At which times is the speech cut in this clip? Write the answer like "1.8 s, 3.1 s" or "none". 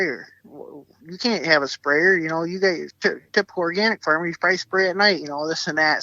none